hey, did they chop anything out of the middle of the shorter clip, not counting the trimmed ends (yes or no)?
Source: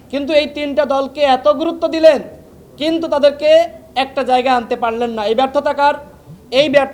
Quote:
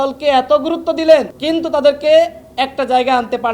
yes